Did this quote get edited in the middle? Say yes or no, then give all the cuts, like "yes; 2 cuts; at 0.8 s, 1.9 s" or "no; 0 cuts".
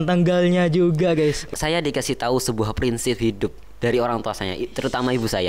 yes; 1 cut; at 1.4 s